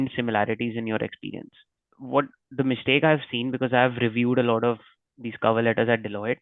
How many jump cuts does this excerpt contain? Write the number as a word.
one